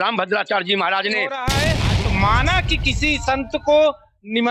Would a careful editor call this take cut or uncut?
cut